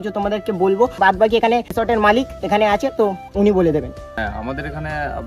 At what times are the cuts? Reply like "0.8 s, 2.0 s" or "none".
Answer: 1.0 s, 4.1 s